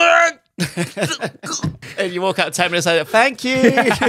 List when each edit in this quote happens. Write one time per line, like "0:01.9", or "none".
0:01.8